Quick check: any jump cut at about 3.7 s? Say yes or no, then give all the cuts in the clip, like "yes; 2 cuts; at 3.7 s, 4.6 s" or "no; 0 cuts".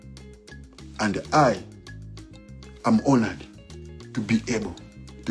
no; 1 cut; at 0.9 s